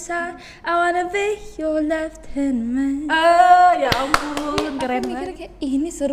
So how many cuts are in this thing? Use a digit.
1